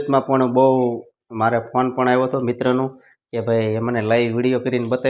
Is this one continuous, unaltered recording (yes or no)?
yes